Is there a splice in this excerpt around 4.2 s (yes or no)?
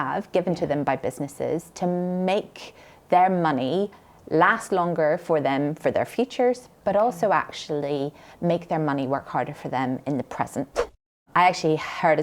no